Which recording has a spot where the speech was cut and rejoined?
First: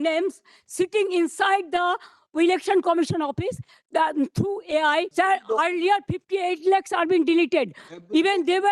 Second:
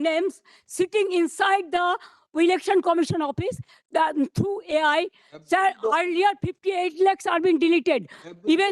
first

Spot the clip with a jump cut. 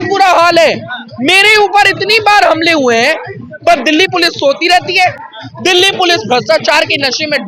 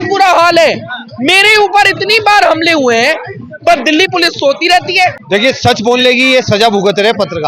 second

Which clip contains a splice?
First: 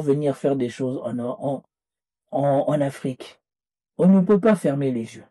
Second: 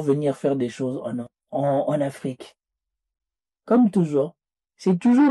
second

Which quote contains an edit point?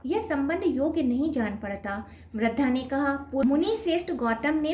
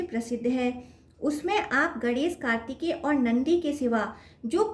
first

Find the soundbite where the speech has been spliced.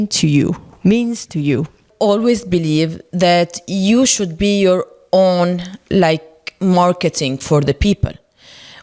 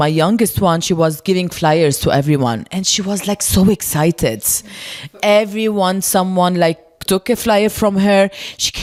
first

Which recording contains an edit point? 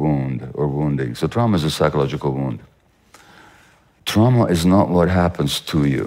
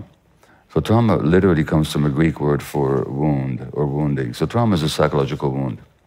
first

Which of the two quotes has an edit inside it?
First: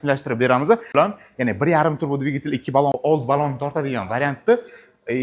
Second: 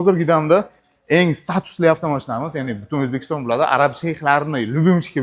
first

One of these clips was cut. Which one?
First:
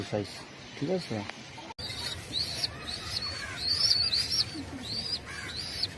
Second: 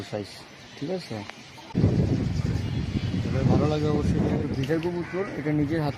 second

